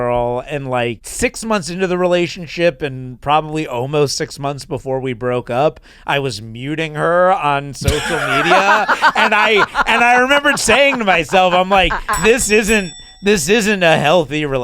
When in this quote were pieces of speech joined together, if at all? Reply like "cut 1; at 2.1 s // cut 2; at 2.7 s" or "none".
cut 1; at 1.0 s